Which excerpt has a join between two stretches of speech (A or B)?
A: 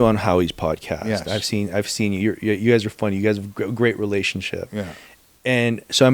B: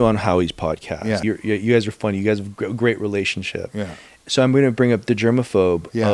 B